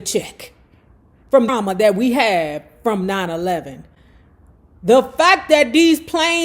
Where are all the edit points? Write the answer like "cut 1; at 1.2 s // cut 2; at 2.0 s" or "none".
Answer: cut 1; at 1.5 s

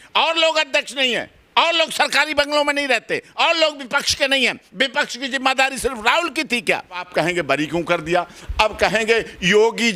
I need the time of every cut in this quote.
cut 1; at 7.1 s

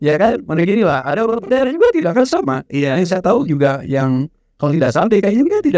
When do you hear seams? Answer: none

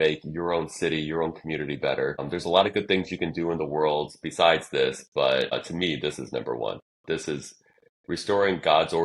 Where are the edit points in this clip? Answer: cut 1; at 2.2 s // cut 2; at 5.5 s

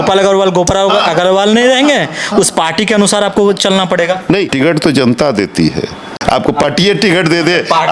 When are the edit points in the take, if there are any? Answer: cut 1; at 4.5 s // cut 2; at 6.1 s

